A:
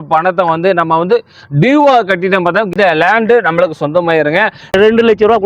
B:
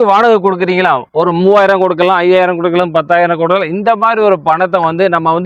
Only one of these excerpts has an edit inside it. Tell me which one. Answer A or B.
A